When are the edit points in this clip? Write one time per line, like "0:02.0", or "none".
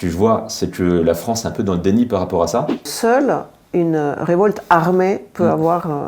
0:02.9